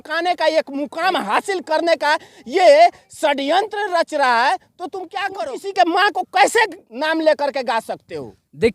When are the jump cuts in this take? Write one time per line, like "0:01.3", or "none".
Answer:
0:05.2
0:06.9